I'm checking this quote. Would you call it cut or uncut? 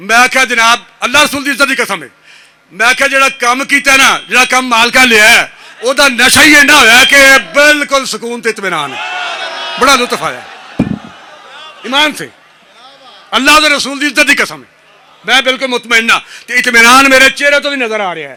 uncut